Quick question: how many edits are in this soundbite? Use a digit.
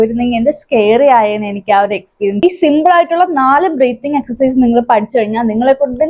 1